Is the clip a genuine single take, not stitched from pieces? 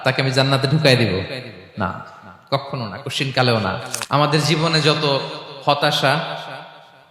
no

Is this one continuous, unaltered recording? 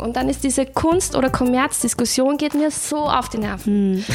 yes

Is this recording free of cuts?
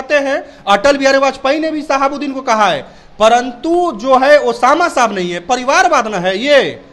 yes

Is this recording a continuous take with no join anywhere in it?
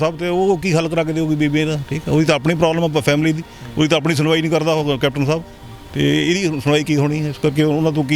yes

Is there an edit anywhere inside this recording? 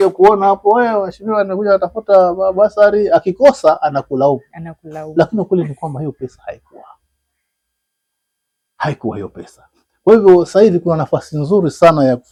no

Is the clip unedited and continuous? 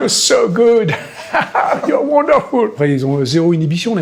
no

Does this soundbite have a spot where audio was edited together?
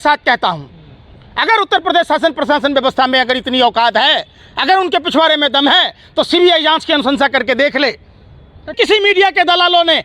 yes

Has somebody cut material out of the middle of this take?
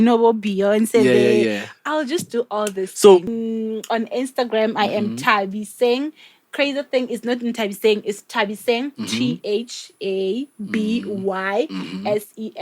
yes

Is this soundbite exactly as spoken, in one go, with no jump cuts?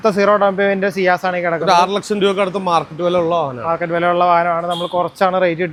yes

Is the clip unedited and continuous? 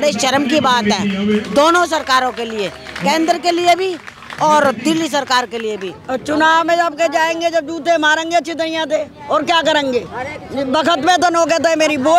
no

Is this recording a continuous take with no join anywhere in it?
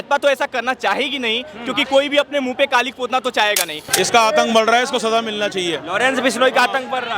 no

